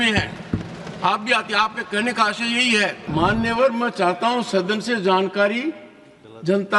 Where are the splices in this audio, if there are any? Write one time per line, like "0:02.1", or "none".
0:03.0

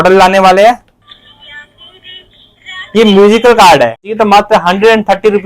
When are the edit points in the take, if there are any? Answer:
0:04.1

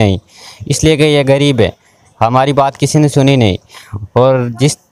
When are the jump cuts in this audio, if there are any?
none

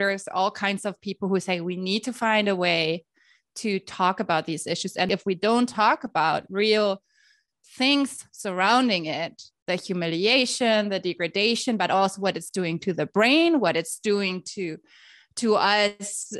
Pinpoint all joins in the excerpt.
0:05.1

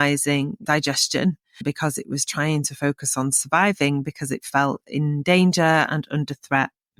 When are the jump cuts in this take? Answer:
none

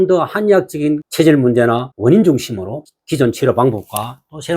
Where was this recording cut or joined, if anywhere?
0:01.0
0:01.9
0:02.9

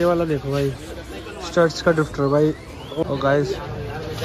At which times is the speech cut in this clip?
0:03.0

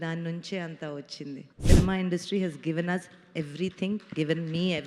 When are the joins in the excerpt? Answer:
0:01.5

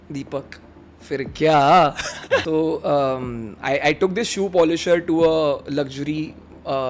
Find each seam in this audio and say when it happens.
0:02.4

